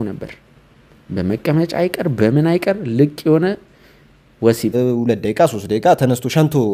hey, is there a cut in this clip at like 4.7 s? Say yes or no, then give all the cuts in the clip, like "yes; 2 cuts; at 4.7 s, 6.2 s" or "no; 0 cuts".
yes; 1 cut; at 4.7 s